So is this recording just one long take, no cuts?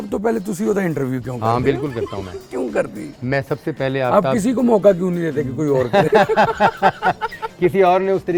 yes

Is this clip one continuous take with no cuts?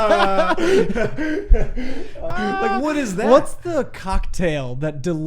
no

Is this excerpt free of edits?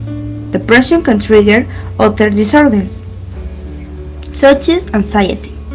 no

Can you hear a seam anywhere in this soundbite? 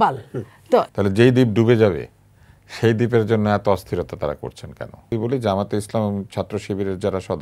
yes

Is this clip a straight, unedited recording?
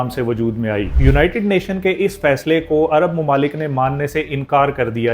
no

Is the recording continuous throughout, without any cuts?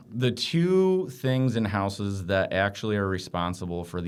yes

